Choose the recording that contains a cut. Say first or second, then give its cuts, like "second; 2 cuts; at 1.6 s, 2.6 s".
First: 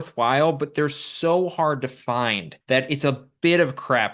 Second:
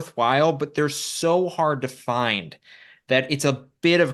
first; 1 cut; at 2.5 s